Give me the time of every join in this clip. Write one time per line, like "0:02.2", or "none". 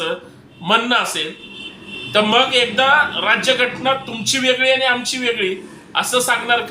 none

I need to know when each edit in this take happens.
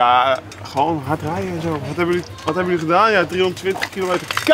none

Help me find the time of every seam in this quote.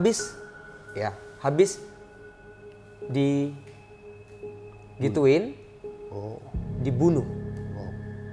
0:07.4

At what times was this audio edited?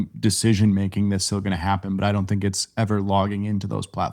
none

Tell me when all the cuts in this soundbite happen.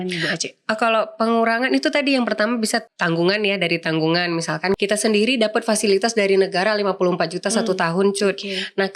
0:02.9
0:04.8

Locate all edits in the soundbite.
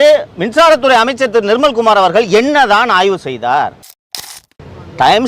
0:04.2

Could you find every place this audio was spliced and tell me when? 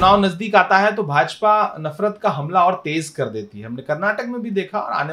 none

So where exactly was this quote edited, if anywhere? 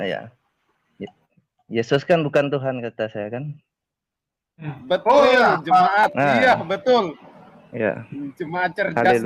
none

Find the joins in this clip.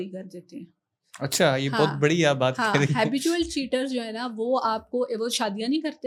none

